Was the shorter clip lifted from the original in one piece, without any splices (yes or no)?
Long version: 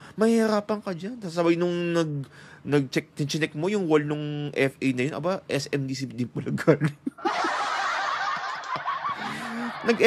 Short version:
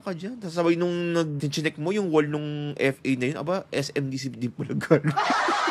no